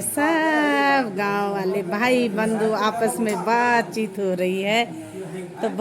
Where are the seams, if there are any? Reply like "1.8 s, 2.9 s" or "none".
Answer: 3.2 s